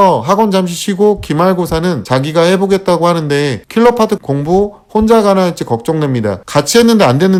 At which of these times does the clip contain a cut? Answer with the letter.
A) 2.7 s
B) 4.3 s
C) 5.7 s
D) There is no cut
D